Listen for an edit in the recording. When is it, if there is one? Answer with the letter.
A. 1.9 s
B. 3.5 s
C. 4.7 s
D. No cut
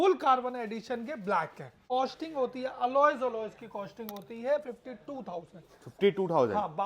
A